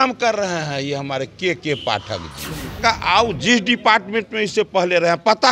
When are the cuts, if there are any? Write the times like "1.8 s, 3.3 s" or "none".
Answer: 2.8 s